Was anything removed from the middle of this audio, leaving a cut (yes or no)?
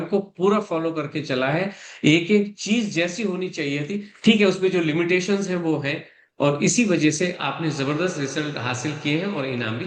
no